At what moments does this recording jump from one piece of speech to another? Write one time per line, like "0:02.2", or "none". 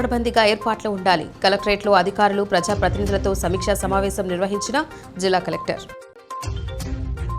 0:06.2